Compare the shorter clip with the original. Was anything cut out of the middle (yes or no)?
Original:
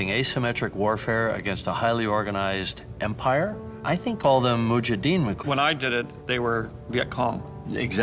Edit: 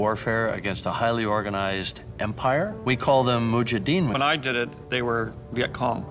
yes